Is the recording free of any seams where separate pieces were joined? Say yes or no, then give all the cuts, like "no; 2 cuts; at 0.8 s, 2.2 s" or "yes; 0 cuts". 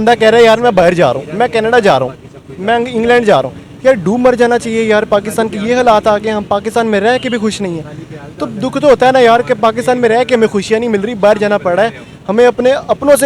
yes; 0 cuts